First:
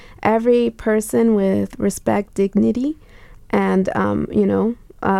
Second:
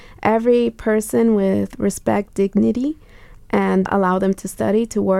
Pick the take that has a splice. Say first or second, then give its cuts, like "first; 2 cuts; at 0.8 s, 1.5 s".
second; 1 cut; at 3.9 s